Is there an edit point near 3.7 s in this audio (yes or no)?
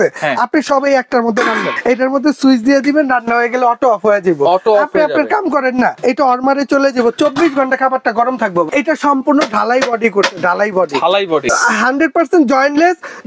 no